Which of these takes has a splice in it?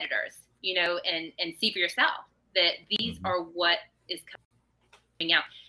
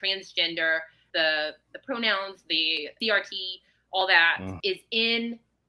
second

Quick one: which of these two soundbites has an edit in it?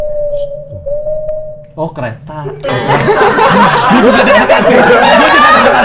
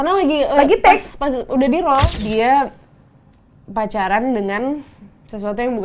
second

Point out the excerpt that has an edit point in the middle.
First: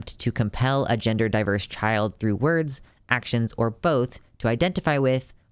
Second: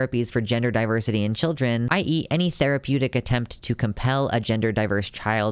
second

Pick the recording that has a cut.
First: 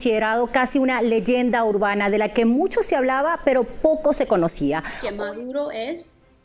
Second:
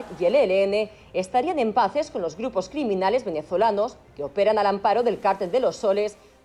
first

